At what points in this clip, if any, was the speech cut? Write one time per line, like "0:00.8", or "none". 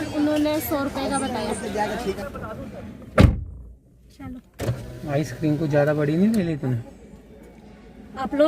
0:02.2